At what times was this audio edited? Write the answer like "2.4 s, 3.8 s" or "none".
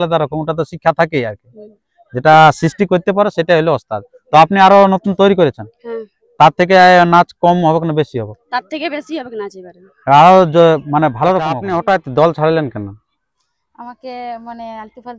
11.6 s